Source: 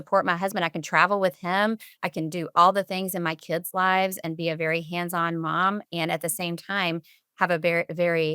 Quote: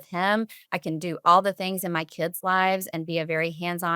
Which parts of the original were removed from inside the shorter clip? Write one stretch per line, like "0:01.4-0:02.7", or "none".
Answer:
none